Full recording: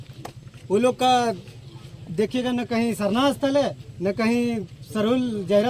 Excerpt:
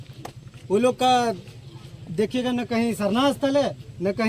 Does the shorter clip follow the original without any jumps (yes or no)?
yes